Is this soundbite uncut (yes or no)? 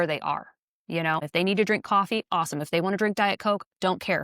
no